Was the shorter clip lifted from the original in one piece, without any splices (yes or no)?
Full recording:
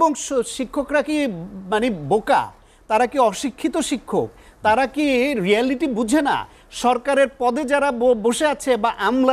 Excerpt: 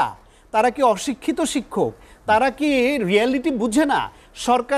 yes